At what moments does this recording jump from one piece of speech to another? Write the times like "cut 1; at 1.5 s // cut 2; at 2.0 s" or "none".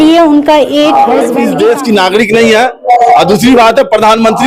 cut 1; at 1.5 s